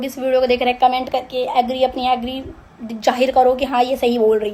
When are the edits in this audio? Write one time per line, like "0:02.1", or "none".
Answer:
none